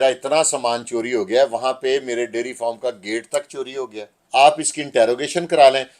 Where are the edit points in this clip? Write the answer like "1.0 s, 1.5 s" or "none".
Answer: 4.1 s